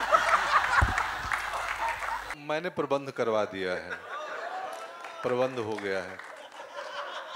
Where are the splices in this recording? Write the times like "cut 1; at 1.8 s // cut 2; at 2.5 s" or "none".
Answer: cut 1; at 2.4 s